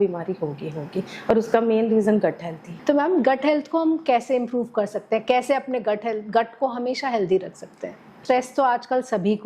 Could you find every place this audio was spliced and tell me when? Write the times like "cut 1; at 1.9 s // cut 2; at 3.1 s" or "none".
cut 1; at 2.8 s // cut 2; at 8.2 s